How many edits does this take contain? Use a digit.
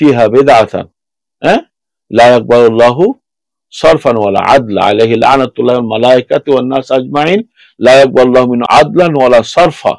1